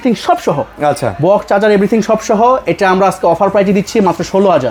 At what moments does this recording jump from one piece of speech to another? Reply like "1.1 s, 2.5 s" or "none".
none